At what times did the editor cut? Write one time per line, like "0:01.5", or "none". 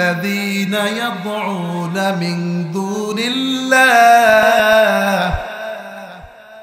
0:04.5